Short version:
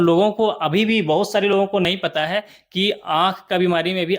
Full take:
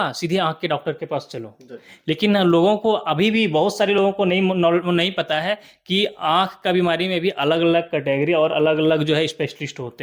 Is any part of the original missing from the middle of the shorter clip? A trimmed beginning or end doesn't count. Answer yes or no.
yes